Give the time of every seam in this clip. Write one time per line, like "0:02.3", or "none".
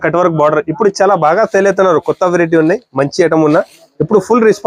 none